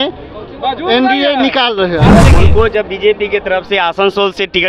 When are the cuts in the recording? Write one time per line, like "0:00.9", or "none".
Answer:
0:02.3